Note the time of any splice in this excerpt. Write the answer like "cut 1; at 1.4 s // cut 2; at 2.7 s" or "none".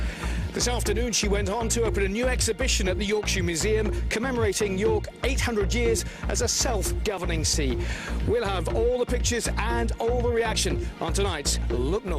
cut 1; at 4.9 s